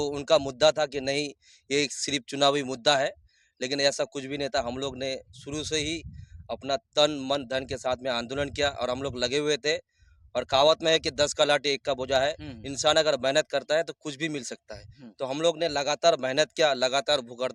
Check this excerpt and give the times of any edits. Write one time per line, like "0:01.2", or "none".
none